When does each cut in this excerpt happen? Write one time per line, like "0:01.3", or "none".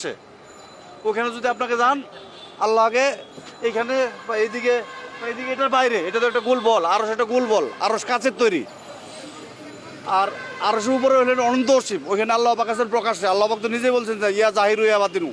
none